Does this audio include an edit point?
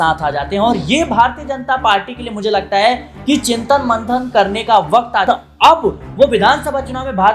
yes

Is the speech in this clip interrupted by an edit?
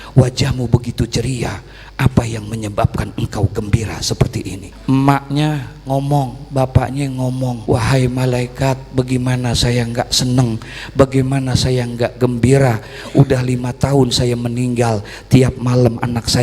yes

